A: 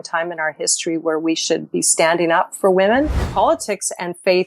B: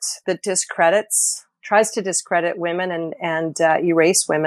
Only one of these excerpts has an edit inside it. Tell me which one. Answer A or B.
A